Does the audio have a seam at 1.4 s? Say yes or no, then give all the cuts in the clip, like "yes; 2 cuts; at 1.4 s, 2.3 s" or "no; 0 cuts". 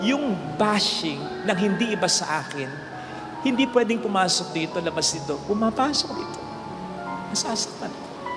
no; 0 cuts